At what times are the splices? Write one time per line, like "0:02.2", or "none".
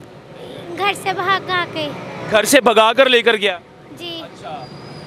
none